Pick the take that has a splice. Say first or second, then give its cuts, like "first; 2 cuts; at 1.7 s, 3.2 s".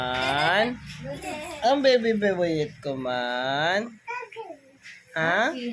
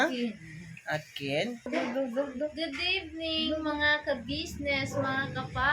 second; 1 cut; at 1.7 s